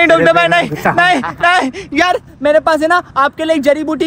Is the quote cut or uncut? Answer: uncut